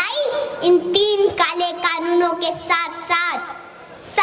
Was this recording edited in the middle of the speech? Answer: no; 0 cuts

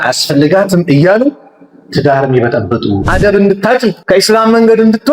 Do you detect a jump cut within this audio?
yes; 2 cuts; at 3.0 s, 4.0 s

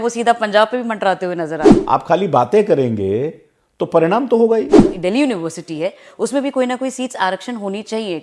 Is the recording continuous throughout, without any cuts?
no; 2 cuts; at 1.7 s, 4.8 s

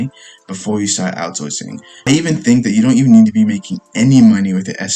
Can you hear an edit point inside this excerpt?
yes; 1 cut; at 1.9 s

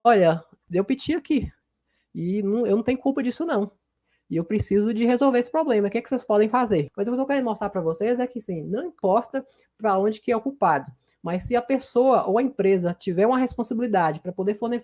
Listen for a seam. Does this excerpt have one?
yes; 1 cut; at 6.9 s

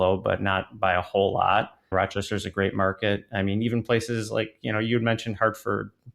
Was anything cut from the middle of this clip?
yes; 1 cut; at 1.9 s

